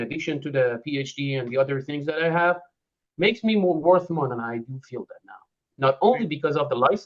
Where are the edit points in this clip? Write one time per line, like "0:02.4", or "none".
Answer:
none